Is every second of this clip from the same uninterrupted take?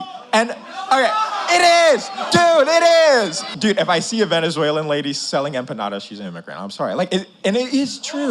no; 1 cut; at 3.4 s

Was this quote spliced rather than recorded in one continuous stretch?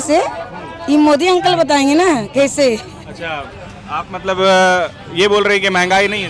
no; 0 cuts

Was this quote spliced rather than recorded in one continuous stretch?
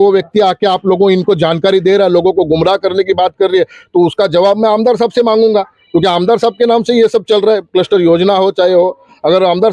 no; 0 cuts

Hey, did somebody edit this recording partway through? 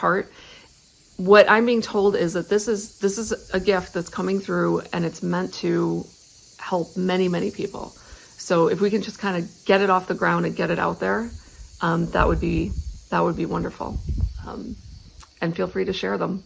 no; 0 cuts

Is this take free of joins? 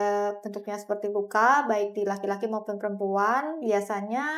yes; 0 cuts

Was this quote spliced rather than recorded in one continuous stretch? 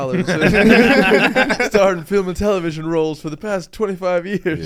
no; 0 cuts

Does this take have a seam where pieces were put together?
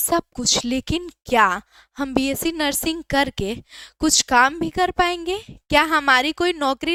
no; 0 cuts

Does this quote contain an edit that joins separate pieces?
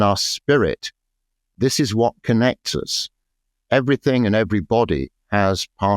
yes; 1 cut; at 1.5 s

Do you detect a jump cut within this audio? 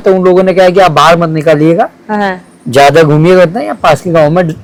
no; 0 cuts

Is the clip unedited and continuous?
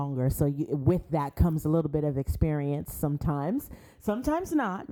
yes; 0 cuts

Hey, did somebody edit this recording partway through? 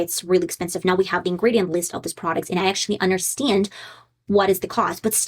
no; 0 cuts

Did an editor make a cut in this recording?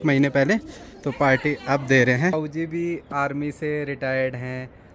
yes; 1 cut; at 2.3 s

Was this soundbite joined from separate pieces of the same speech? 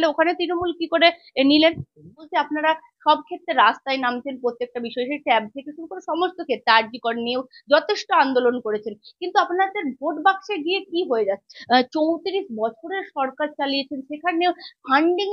yes; 2 cuts; at 2.2 s, 11.5 s

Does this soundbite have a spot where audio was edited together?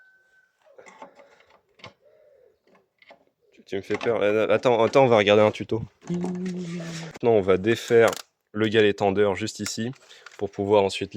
yes; 1 cut; at 7.2 s

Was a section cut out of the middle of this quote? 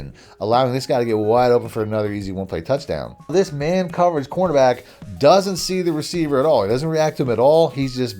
yes; 1 cut; at 3.3 s

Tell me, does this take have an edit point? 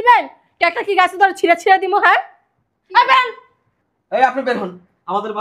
no; 0 cuts

